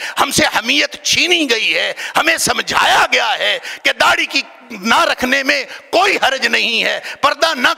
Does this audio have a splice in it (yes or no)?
no